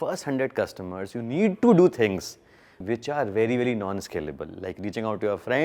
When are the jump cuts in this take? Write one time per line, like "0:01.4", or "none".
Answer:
0:02.8